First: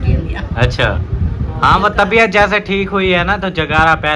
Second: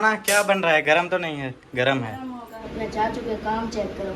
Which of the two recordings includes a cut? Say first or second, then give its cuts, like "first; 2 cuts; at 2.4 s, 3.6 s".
second; 1 cut; at 2.6 s